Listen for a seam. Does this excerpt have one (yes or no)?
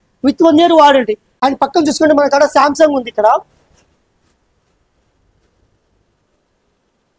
no